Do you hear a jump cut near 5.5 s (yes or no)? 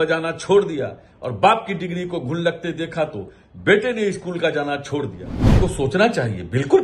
yes